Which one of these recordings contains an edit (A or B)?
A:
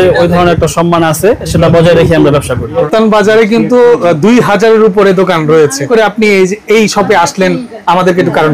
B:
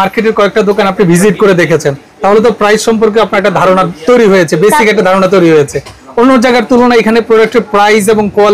A